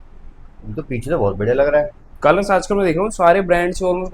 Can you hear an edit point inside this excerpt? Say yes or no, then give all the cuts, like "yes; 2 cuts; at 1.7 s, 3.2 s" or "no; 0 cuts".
no; 0 cuts